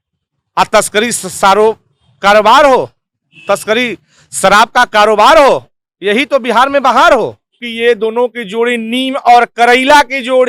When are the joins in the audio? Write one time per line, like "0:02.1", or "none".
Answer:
0:07.6